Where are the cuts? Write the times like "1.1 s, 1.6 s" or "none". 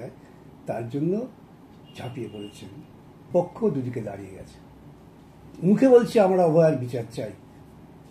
3.3 s